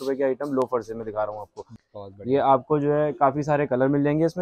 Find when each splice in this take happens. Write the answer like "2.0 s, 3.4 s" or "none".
1.7 s